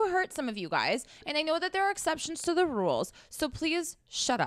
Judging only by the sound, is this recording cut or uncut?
uncut